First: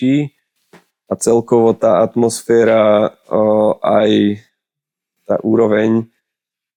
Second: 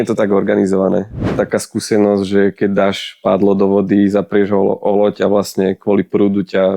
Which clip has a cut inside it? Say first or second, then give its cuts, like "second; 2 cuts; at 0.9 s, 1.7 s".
second; 1 cut; at 1.3 s